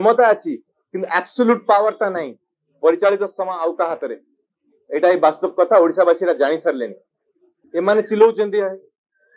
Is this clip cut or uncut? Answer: cut